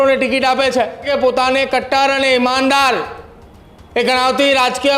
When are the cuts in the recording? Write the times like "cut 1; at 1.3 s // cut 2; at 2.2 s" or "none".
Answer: cut 1; at 1.1 s